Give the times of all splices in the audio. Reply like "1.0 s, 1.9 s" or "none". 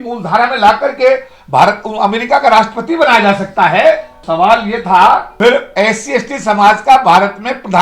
4.2 s, 5.3 s